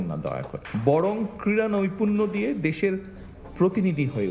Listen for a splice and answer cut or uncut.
uncut